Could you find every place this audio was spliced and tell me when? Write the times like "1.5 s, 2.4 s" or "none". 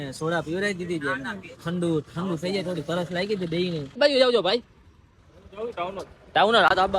4.0 s